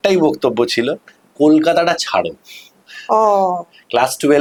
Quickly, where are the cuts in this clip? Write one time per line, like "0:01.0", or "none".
none